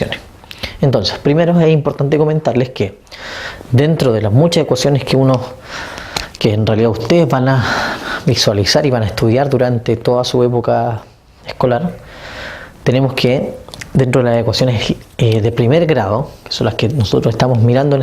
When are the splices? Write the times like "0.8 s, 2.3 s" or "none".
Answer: 9.4 s